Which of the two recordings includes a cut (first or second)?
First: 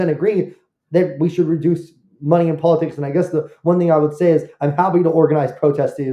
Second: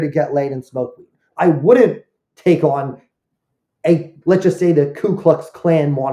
second